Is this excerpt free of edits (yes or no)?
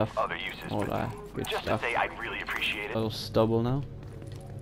no